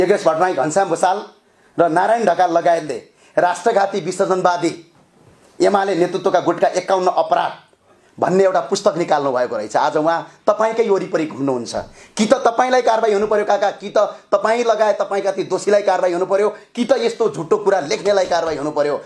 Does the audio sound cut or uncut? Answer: uncut